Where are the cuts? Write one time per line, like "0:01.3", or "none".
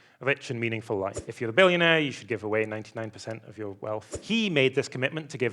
0:01.2
0:04.1